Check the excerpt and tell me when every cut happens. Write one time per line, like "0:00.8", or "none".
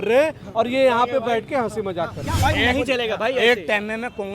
0:02.5